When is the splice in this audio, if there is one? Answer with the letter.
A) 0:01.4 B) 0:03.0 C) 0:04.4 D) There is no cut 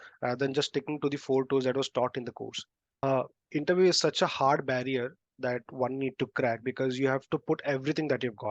B